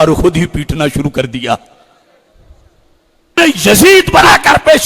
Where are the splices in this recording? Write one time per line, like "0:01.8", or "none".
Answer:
0:03.4